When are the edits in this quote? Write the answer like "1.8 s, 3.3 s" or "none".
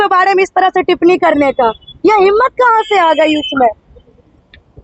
none